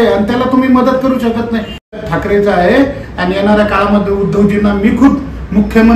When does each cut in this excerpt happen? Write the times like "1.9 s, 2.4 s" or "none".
1.9 s